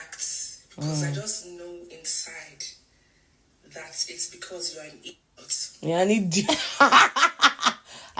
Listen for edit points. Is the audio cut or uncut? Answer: uncut